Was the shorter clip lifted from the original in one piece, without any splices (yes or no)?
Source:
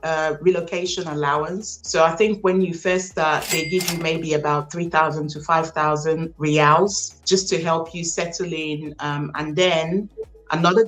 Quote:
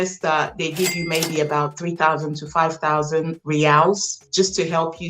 yes